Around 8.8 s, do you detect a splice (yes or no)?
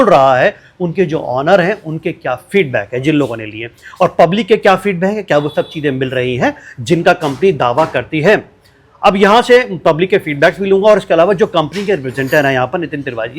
no